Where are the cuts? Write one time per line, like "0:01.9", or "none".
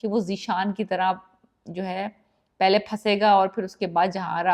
none